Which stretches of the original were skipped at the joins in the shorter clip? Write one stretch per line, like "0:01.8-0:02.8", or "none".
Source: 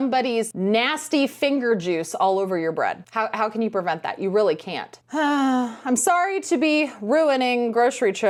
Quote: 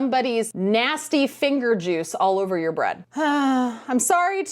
0:03.0-0:05.0